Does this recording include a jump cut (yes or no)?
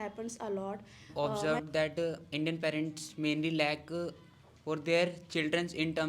yes